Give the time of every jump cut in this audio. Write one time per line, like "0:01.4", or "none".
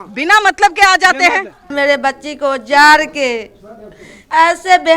0:01.7

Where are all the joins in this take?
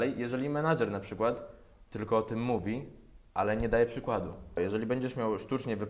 0:04.6

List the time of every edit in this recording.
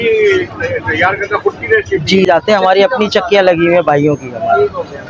0:02.3

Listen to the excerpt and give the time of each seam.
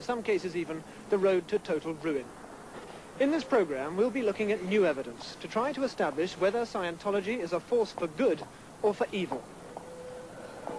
0:02.4

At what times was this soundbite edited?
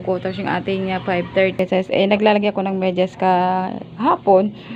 0:01.6

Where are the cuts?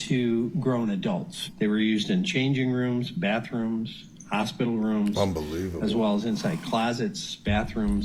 0:01.5

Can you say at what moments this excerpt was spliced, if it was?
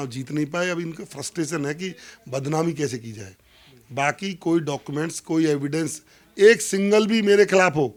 none

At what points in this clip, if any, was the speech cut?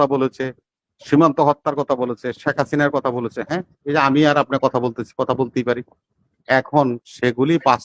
none

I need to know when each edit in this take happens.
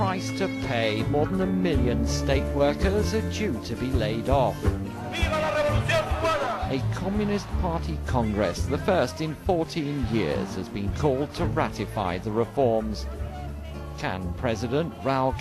none

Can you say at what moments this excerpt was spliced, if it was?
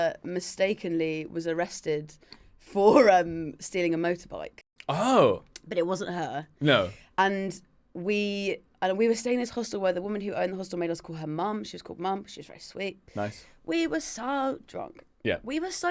none

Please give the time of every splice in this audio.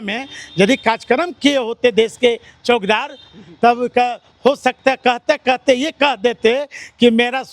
none

